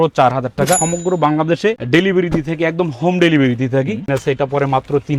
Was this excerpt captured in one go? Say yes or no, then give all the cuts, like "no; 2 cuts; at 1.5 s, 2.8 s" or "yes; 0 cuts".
no; 2 cuts; at 0.8 s, 4.1 s